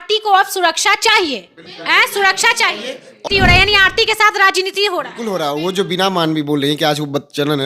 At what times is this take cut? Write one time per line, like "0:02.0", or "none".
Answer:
0:03.2